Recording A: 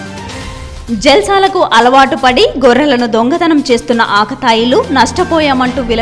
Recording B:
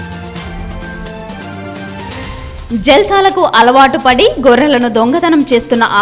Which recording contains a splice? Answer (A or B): B